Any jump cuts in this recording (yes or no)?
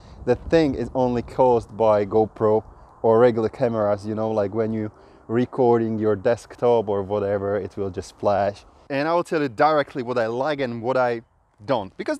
yes